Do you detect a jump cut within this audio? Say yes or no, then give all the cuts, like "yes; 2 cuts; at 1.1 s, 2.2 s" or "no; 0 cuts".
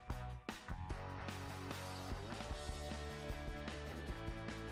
no; 0 cuts